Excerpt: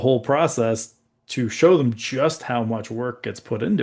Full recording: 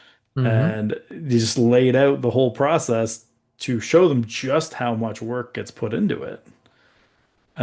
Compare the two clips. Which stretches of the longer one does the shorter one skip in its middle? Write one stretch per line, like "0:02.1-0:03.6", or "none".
none